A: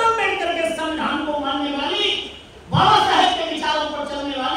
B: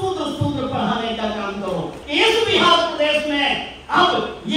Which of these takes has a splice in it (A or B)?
B